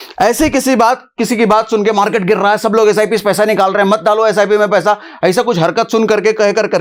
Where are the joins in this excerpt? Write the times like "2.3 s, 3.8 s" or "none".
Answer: none